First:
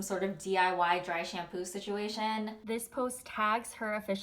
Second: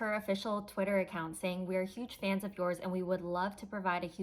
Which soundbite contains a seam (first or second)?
first